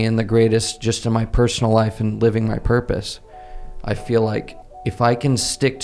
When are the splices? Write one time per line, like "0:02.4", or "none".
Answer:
none